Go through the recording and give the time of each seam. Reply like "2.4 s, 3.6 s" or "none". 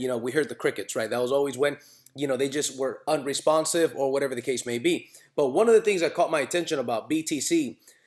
6.9 s